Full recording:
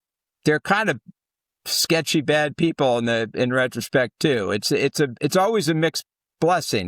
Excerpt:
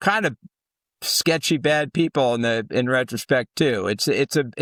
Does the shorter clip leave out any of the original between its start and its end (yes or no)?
no